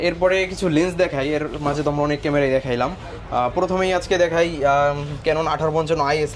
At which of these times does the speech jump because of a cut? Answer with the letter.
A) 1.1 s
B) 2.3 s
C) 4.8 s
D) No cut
D